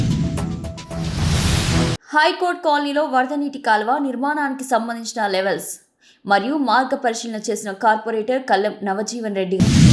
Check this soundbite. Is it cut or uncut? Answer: cut